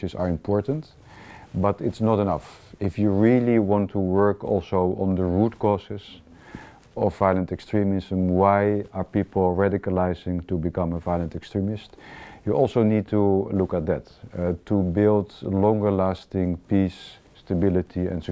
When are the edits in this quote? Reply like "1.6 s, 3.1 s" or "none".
none